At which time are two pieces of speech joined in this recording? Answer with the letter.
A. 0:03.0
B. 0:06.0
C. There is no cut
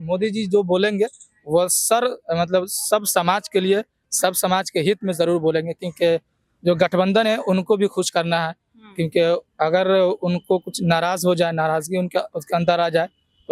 C